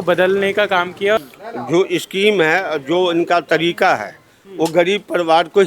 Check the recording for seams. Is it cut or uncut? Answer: cut